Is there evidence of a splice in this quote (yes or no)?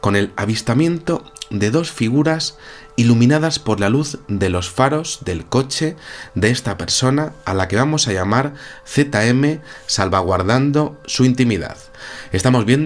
yes